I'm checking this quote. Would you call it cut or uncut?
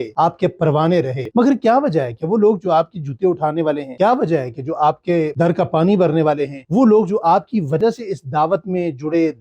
cut